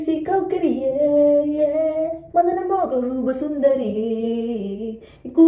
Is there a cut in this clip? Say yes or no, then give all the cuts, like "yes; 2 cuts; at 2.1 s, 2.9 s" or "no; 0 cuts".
yes; 1 cut; at 2.2 s